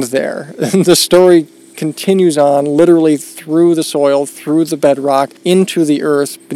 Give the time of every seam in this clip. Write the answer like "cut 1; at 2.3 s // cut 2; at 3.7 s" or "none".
cut 1; at 5.3 s